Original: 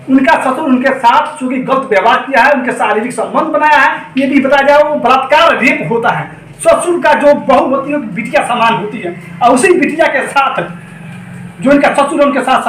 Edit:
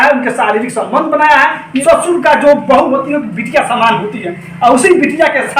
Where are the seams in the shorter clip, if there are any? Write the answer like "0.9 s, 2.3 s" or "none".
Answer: 1.7 s